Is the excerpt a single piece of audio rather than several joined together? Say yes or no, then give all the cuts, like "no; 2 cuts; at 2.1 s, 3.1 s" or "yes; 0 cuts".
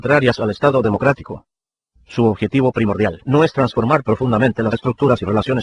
no; 1 cut; at 4.0 s